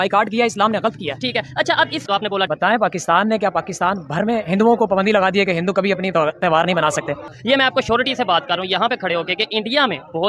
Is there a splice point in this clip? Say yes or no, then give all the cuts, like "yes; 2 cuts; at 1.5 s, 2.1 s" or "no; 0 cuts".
yes; 1 cut; at 2.0 s